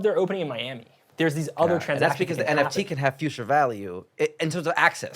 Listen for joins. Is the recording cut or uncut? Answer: cut